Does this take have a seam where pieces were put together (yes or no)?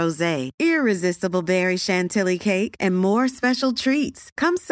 no